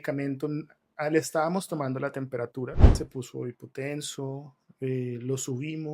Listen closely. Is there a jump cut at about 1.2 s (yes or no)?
no